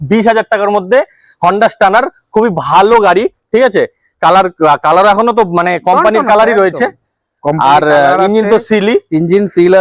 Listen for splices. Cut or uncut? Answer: uncut